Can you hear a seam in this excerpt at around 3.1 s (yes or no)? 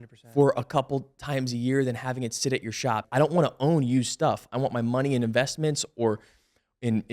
yes